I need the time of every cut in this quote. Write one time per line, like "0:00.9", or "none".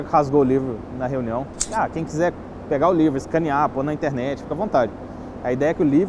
0:01.6